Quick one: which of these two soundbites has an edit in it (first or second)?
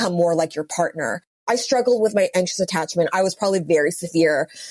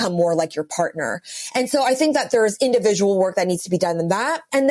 first